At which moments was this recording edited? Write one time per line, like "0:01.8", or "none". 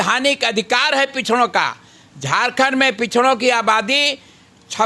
none